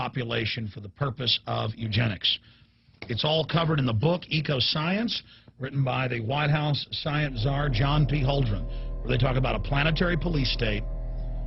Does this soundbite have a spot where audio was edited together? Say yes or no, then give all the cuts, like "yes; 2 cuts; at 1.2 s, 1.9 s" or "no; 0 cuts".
yes; 1 cut; at 8.5 s